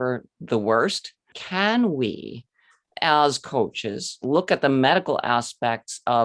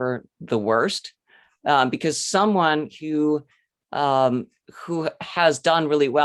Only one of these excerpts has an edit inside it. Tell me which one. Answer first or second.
first